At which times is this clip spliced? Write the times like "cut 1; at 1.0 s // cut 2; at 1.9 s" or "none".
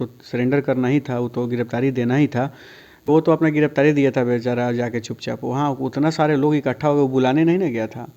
cut 1; at 3.0 s

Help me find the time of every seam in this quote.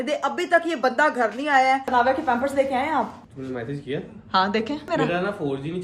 cut 1; at 1.9 s // cut 2; at 4.9 s

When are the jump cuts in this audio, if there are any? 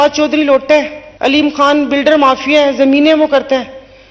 cut 1; at 1.0 s

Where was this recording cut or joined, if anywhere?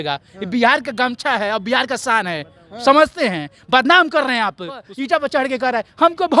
cut 1; at 4.9 s

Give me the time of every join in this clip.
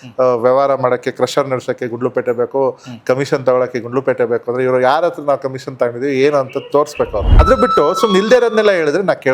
cut 1; at 7.4 s

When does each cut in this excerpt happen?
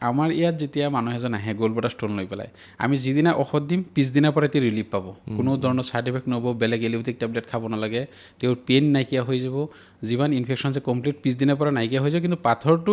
none

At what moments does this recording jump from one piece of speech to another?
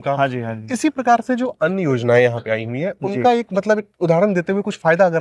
none

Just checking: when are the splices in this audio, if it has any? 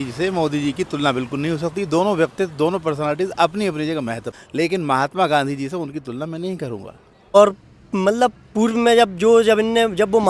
cut 1; at 4.4 s // cut 2; at 7.3 s

